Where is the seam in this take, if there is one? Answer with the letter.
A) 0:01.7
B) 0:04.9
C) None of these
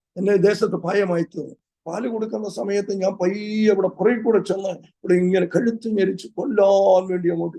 A